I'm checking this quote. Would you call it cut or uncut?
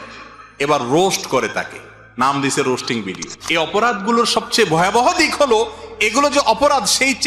cut